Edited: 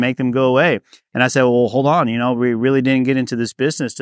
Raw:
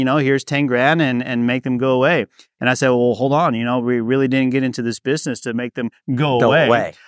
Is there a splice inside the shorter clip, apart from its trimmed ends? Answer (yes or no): no